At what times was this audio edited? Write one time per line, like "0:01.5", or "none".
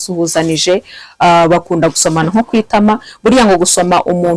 none